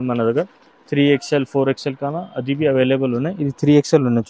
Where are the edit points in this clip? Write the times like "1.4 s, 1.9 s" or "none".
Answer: none